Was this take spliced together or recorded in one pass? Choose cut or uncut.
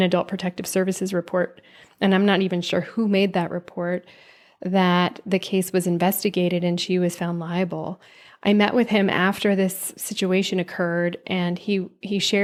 uncut